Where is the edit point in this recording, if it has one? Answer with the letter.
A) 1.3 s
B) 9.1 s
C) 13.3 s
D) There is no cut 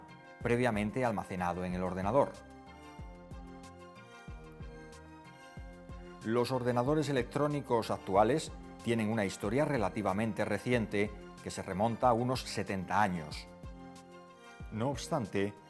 C